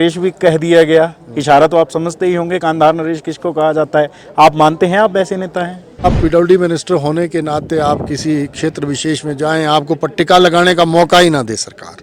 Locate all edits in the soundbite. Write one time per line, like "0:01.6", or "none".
0:06.1